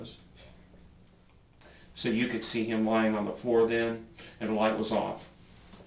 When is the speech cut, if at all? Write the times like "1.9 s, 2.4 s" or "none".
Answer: 1.4 s